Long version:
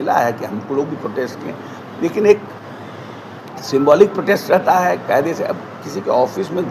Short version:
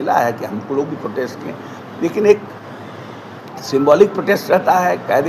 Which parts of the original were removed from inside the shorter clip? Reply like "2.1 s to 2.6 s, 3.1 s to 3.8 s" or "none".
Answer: none